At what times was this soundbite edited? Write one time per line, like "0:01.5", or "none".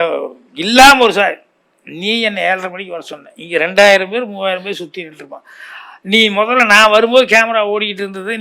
none